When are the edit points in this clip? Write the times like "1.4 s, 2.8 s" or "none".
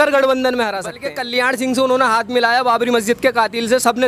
1.1 s